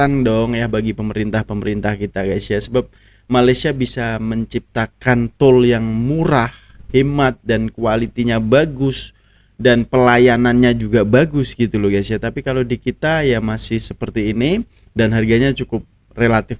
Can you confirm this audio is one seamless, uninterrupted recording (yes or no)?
yes